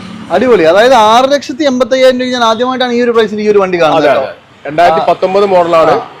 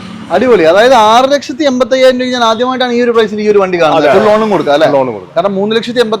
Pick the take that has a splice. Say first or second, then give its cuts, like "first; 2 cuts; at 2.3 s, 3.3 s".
second; 1 cut; at 4.2 s